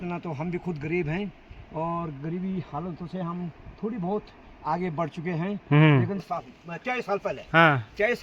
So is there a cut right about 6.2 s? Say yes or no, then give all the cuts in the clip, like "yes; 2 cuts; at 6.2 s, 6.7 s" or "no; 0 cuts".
yes; 1 cut; at 6.2 s